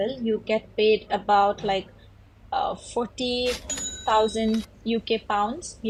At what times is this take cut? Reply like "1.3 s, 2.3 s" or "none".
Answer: none